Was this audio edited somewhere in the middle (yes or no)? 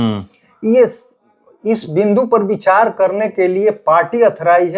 no